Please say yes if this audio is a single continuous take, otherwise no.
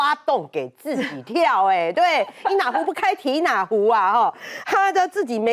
yes